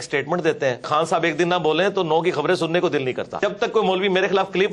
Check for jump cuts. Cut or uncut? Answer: cut